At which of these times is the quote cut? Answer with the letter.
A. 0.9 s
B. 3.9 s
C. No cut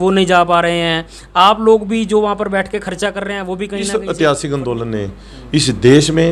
B